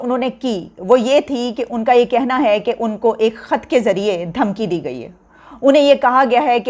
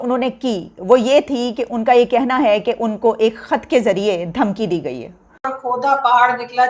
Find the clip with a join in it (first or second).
second